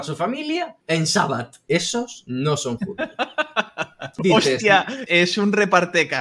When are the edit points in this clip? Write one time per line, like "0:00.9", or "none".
0:01.6
0:04.1
0:05.0